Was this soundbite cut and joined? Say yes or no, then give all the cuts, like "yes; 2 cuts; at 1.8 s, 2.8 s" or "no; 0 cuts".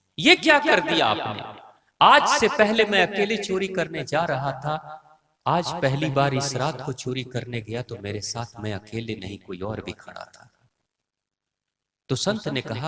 no; 0 cuts